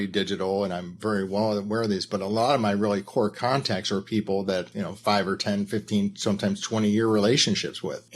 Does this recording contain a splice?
yes; 1 cut; at 4.7 s

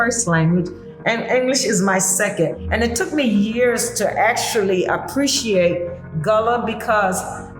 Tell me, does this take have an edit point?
yes; 1 cut; at 2.6 s

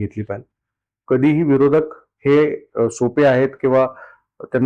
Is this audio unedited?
yes; 0 cuts

